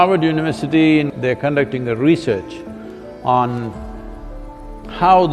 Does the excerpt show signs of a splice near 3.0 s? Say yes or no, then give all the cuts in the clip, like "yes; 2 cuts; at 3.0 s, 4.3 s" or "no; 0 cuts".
no; 1 cut; at 1.1 s